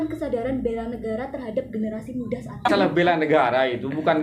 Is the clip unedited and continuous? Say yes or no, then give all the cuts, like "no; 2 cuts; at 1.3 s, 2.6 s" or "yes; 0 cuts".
no; 1 cut; at 2.7 s